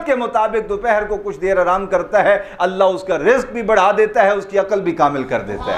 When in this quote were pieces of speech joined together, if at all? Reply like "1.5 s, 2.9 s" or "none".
none